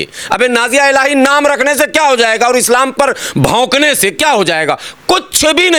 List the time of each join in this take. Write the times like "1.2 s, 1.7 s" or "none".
none